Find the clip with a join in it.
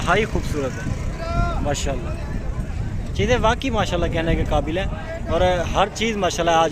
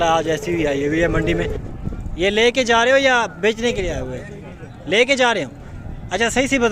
second; 1 cut; at 1.3 s

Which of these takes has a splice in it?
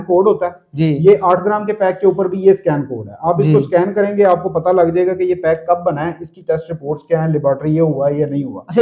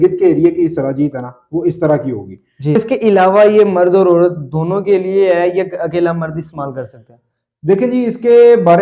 second; 1 cut; at 2.8 s

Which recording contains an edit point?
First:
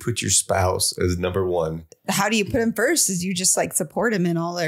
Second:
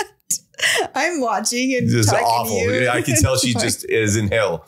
first; 1 cut; at 1.9 s

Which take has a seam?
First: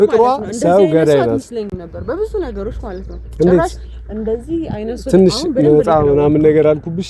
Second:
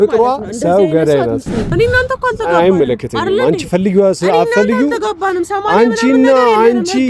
second; 1 cut; at 1.7 s

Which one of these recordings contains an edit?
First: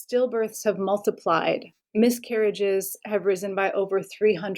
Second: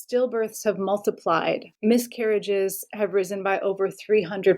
second; 1 cut; at 1.7 s

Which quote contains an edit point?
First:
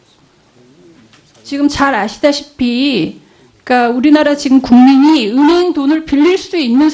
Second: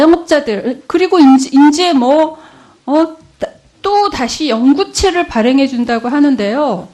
first; 1 cut; at 4.9 s

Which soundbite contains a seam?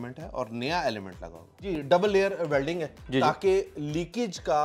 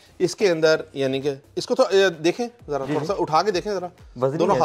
first; 1 cut; at 1.7 s

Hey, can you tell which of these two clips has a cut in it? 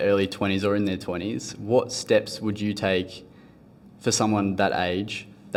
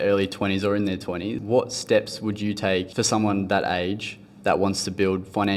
second; 2 cuts; at 1.4 s, 2.9 s

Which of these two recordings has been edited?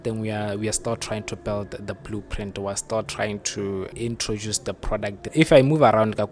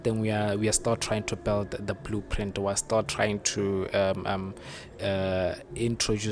first; 2 cuts; at 3.9 s, 5.2 s

